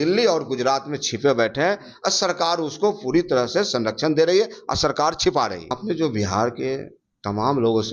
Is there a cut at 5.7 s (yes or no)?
yes